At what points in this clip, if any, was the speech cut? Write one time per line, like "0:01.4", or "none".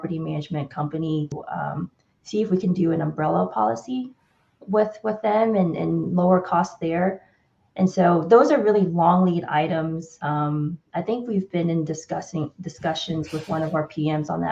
0:01.4
0:10.1